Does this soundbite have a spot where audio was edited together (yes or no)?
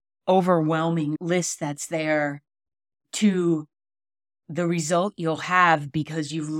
yes